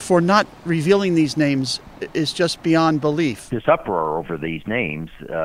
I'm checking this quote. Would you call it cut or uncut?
cut